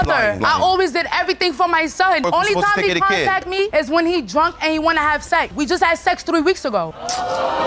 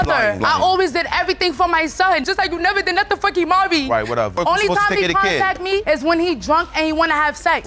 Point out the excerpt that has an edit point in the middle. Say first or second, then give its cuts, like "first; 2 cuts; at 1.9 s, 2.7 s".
first; 2 cuts; at 2.2 s, 5.5 s